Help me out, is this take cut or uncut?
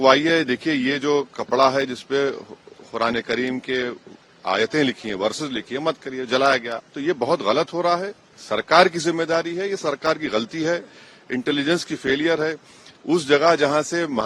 cut